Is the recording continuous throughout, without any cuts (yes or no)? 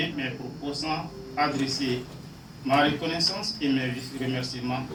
yes